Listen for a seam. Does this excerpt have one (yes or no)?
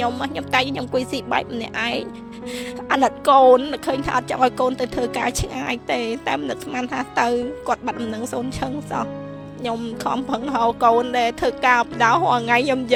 no